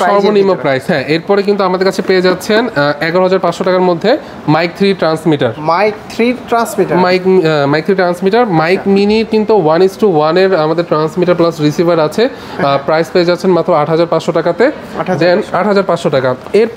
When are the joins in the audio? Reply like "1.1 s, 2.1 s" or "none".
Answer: none